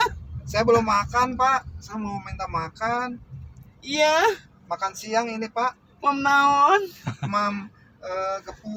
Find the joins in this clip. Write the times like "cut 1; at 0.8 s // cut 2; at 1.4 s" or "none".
none